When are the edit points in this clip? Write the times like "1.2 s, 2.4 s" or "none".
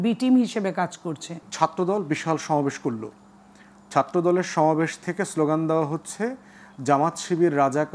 1.5 s